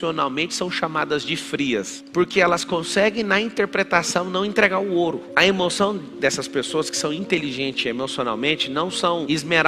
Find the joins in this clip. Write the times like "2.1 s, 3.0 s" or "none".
2.0 s